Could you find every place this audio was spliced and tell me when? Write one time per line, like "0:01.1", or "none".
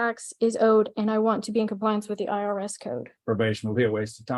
0:03.1